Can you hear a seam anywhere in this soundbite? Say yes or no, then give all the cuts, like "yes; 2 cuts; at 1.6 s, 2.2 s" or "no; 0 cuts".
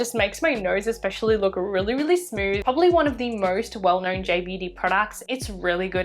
yes; 1 cut; at 2.6 s